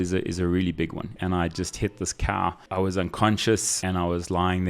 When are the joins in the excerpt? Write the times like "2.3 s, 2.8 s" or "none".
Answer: 1.1 s, 2.6 s, 3.7 s